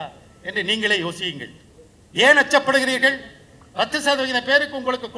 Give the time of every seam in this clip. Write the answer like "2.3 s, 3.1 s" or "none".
none